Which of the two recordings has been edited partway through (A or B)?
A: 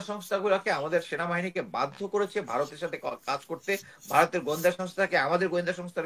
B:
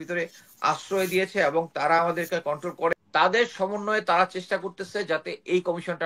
B